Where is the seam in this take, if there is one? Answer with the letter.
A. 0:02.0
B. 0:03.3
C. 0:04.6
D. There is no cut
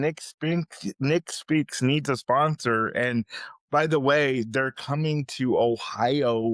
D